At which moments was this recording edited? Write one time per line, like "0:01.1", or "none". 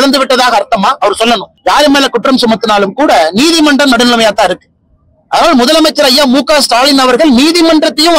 0:01.5